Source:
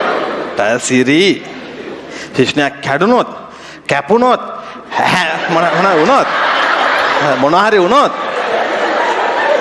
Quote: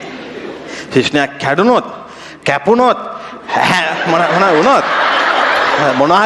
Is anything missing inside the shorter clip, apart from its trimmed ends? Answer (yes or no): no